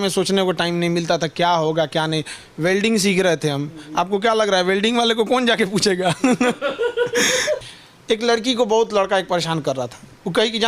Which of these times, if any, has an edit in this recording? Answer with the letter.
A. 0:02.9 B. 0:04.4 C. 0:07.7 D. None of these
C